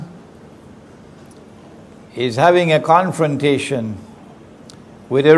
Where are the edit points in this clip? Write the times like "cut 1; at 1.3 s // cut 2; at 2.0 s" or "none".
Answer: cut 1; at 3.5 s